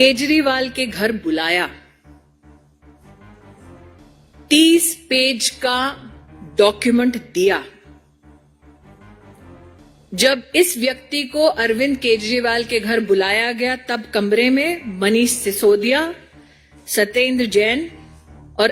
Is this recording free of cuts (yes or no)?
no